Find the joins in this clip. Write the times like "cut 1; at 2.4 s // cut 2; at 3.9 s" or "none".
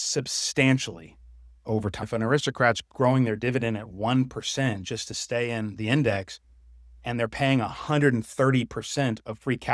cut 1; at 2.1 s

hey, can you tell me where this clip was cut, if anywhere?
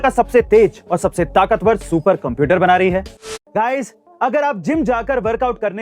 cut 1; at 3.4 s

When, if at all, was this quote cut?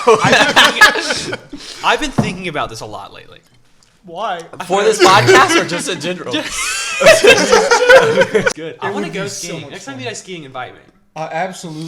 cut 1; at 8.5 s

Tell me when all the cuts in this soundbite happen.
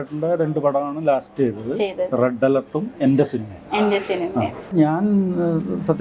cut 1; at 4.7 s

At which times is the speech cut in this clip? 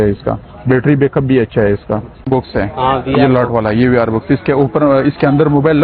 cut 1; at 2.3 s

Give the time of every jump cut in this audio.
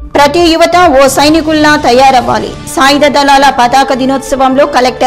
none

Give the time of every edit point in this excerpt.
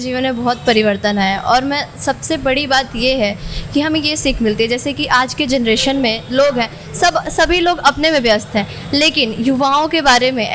none

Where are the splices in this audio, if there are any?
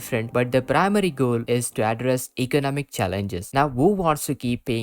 cut 1; at 3.5 s

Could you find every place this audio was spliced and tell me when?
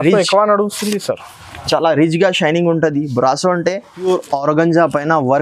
cut 1; at 3.9 s

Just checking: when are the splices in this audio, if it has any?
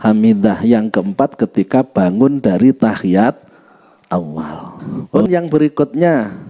cut 1; at 5.1 s

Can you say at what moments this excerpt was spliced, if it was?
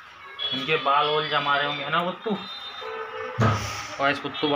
none

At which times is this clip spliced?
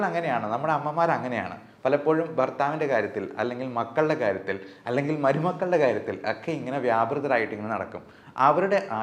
none

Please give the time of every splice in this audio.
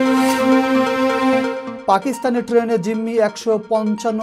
none

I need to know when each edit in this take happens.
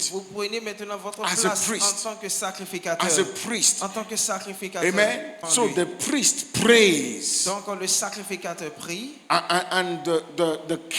cut 1; at 5.4 s

